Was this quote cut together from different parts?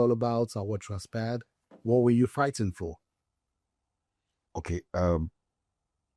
no; 0 cuts

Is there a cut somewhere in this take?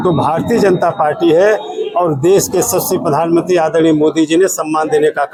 no; 0 cuts

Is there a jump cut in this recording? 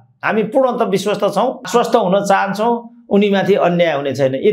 yes; 1 cut; at 1.7 s

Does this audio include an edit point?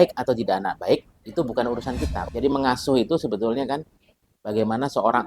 yes; 1 cut; at 2.2 s

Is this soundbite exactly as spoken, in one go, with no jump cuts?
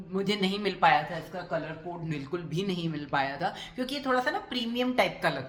yes; 0 cuts

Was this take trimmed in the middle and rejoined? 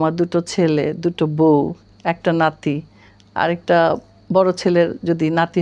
no; 0 cuts

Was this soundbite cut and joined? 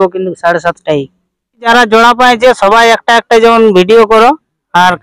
yes; 1 cut; at 1.7 s

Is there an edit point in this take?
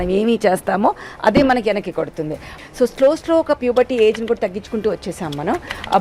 yes; 1 cut; at 2.4 s

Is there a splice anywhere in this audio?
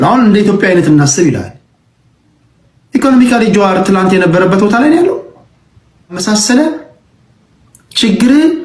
yes; 1 cut; at 6.2 s

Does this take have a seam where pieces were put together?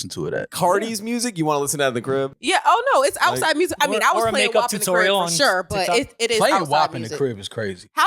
yes; 1 cut; at 2.4 s

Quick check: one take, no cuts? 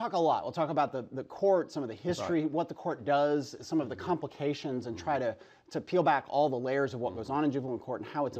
no; 1 cut; at 3.5 s

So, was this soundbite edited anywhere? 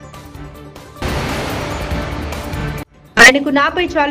yes; 2 cuts; at 1.0 s, 2.9 s

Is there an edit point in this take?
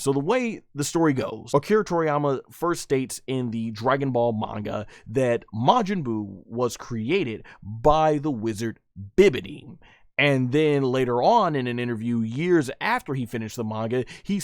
yes; 1 cut; at 1.3 s

